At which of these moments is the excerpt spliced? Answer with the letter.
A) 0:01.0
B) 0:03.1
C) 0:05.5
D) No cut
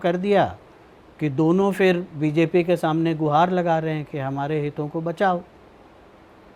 D